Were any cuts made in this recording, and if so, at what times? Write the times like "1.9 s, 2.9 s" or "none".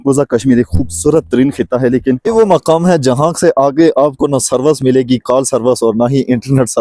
2.2 s